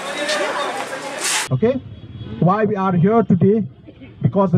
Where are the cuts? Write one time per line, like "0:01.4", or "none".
none